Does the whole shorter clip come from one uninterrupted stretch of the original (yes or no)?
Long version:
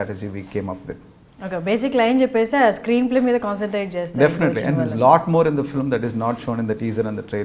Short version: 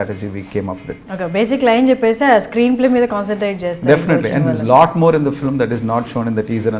no